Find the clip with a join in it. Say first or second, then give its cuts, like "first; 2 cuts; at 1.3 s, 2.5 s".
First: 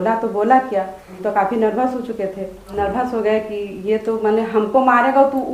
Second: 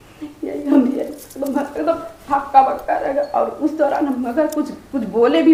first; 2 cuts; at 1.0 s, 2.7 s